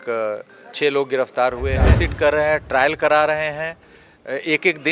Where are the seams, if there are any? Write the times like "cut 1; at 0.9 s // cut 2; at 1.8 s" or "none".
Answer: cut 1; at 2.0 s